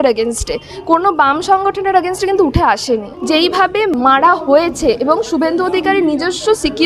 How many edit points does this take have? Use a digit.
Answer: 2